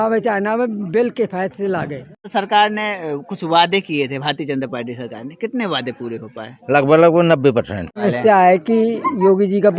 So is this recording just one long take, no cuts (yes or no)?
no